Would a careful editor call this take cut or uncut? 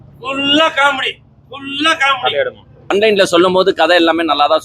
cut